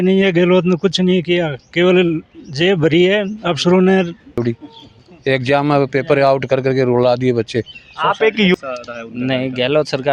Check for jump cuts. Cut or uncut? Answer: cut